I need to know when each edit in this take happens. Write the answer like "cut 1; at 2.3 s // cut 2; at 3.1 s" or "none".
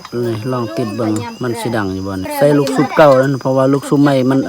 cut 1; at 2.3 s